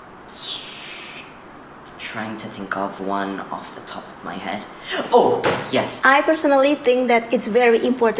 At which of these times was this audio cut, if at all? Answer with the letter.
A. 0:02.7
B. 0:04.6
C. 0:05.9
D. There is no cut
C